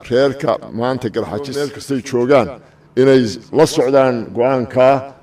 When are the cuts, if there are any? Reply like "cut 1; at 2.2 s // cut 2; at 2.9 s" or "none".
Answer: cut 1; at 1.8 s